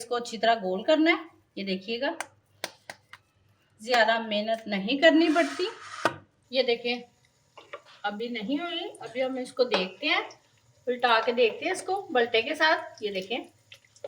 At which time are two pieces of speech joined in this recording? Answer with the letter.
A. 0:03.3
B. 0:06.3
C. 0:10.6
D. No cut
B